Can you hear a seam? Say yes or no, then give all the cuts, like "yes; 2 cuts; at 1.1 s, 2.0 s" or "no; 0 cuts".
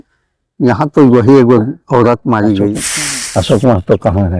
yes; 1 cut; at 2.9 s